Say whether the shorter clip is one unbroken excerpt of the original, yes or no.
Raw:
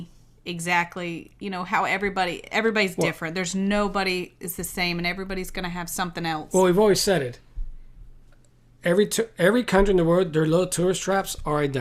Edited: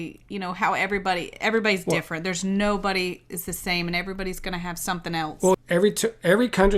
no